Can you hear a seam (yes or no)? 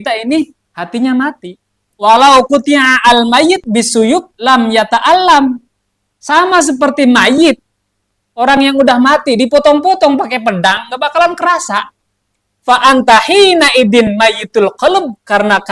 yes